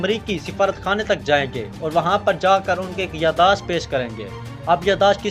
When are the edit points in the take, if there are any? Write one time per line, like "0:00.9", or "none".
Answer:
none